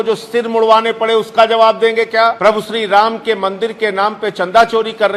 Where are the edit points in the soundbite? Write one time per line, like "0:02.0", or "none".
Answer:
0:02.4

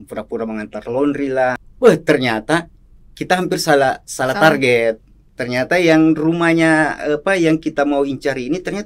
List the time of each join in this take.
0:01.6

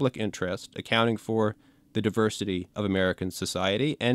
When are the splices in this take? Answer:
0:02.7

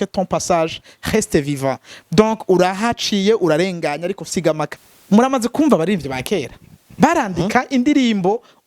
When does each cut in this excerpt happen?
0:04.7

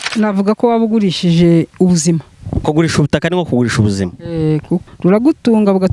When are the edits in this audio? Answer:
0:04.8

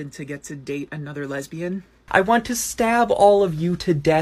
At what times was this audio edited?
0:01.9

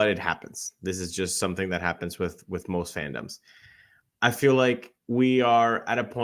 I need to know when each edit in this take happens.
0:04.9

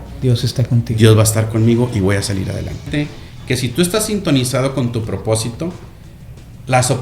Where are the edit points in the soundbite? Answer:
0:02.9

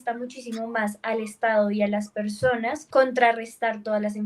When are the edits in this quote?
0:02.8

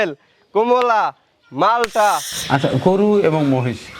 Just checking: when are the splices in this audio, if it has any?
0:02.3

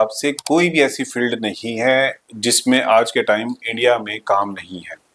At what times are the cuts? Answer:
none

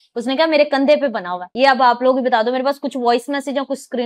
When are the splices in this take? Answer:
0:01.4

